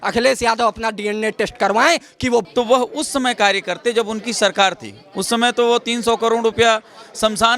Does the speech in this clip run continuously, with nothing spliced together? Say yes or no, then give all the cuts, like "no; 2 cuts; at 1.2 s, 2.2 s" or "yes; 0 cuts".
no; 1 cut; at 2.4 s